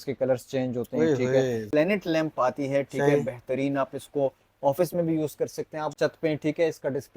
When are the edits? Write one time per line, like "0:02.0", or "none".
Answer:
0:01.6
0:05.9